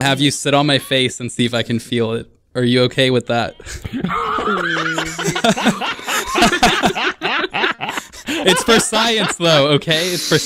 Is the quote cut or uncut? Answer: uncut